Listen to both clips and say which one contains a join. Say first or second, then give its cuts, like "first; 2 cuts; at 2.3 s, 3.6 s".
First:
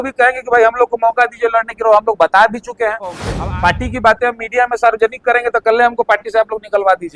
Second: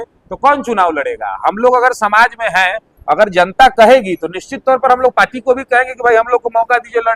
first; 1 cut; at 3.3 s